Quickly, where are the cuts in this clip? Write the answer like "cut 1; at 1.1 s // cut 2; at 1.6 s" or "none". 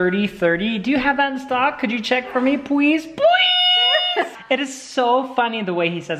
cut 1; at 4.4 s